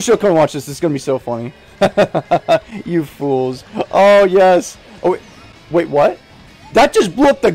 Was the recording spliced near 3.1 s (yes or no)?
no